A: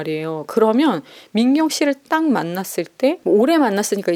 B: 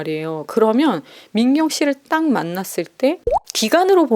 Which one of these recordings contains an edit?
B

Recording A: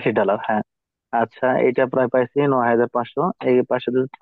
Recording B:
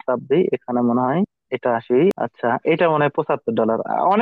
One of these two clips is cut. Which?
B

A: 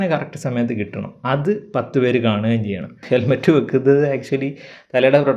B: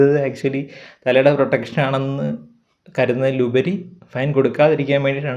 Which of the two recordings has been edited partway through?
A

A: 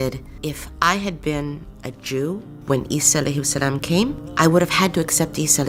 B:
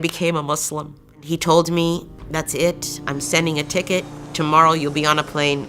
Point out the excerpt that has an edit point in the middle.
B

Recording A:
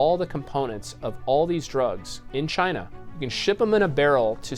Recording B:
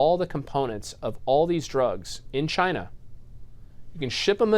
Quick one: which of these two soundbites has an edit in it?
A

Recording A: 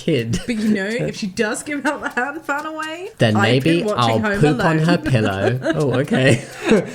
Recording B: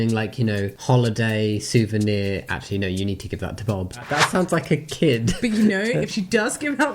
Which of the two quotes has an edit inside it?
B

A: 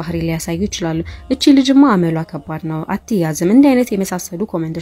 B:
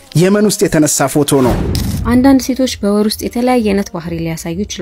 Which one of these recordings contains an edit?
B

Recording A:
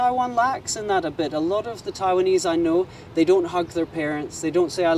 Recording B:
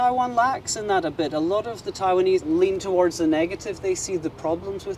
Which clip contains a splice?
B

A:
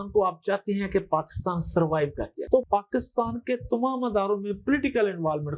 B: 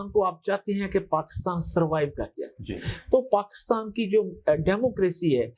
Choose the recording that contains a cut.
A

